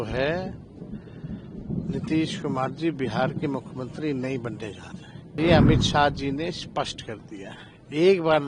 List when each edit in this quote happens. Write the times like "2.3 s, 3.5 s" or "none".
5.4 s